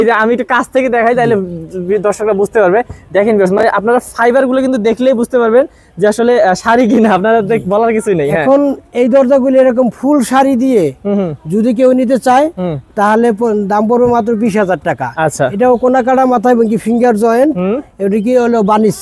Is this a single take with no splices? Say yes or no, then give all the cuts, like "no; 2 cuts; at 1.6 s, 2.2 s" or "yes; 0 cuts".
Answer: yes; 0 cuts